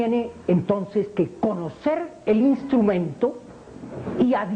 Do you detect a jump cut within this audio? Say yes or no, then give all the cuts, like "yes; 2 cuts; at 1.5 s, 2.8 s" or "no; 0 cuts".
no; 0 cuts